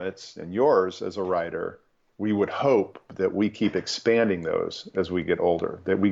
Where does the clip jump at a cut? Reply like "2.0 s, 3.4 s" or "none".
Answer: none